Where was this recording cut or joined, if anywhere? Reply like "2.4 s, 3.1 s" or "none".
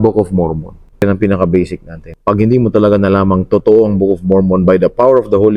1.0 s